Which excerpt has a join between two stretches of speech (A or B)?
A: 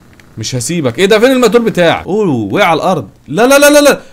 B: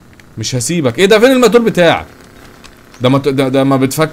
A